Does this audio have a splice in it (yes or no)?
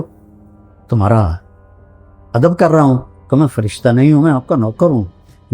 no